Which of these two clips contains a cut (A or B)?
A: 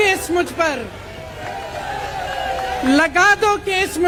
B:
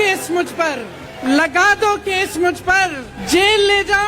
B